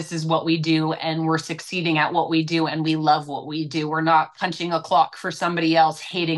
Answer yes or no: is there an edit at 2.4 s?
no